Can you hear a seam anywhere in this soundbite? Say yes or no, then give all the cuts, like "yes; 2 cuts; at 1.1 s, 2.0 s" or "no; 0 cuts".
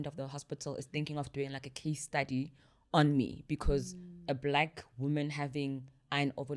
no; 0 cuts